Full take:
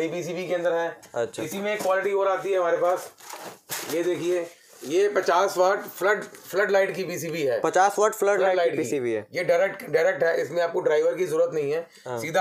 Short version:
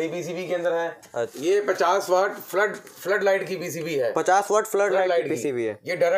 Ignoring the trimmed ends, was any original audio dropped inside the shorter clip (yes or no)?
yes